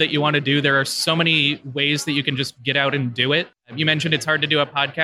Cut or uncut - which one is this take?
uncut